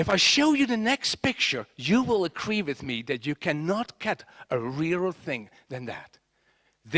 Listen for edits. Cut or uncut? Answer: cut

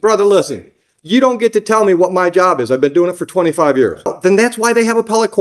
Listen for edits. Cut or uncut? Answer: cut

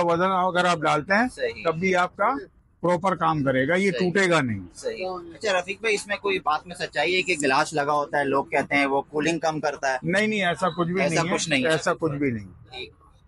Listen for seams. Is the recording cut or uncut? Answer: uncut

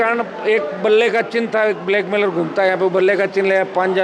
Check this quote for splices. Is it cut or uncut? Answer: uncut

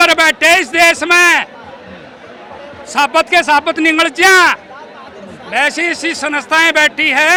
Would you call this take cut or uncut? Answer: uncut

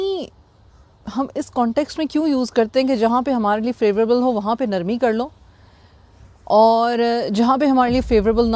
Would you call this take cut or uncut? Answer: uncut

